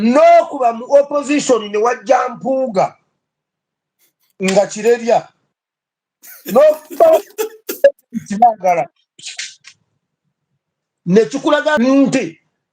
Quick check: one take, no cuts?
no; 1 cut; at 11.8 s

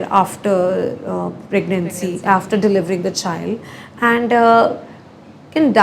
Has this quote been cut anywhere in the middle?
no; 0 cuts

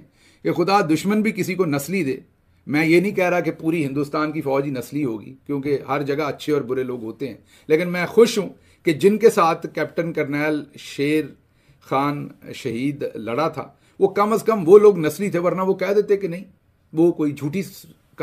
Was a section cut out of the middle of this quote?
no; 0 cuts

